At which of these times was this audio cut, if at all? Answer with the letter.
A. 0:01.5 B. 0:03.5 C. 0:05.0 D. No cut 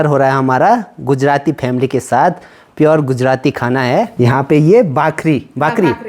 D